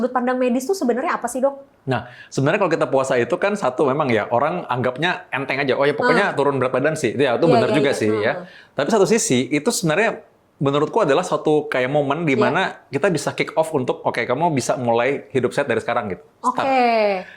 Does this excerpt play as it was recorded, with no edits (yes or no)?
yes